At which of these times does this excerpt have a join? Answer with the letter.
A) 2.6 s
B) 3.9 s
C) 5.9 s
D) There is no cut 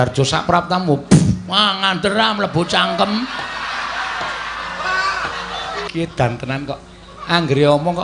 C